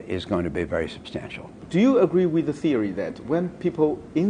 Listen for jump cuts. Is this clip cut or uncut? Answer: uncut